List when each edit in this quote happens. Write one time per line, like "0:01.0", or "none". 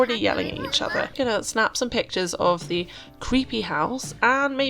0:01.1